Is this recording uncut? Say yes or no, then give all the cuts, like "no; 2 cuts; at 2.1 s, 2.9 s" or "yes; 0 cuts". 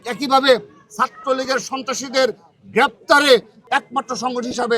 no; 1 cut; at 3.6 s